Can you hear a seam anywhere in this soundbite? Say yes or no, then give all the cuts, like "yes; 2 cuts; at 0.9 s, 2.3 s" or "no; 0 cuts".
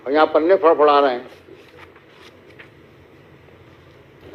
no; 0 cuts